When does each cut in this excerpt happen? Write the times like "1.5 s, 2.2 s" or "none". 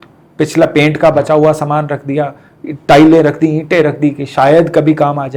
none